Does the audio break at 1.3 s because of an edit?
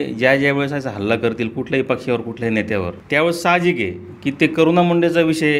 no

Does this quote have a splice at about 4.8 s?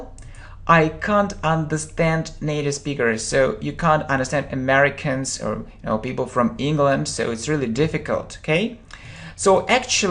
yes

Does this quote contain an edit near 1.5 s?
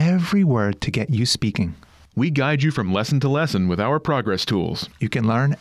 no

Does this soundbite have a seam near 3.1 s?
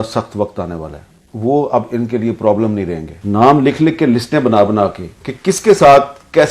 yes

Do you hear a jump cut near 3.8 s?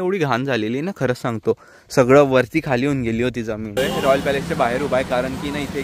yes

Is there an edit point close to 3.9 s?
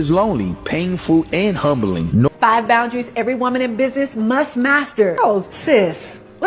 no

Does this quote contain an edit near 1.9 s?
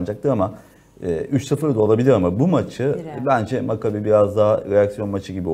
no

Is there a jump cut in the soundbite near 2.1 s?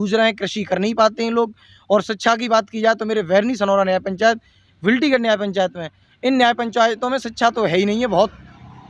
no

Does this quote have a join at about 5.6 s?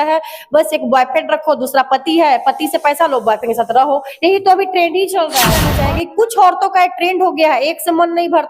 yes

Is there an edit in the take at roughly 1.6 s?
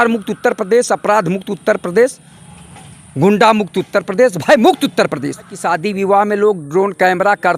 no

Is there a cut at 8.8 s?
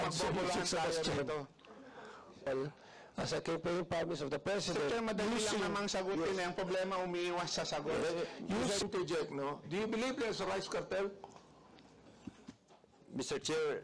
yes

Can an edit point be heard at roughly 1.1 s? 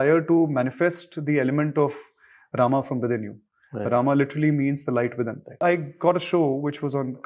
no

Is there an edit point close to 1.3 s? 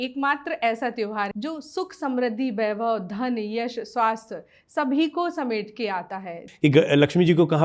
yes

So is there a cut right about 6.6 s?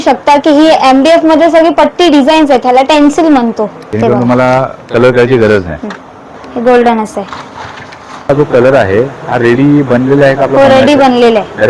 no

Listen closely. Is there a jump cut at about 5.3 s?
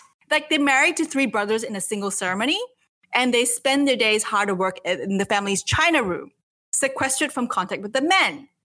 yes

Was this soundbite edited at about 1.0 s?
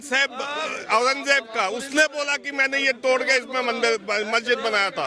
no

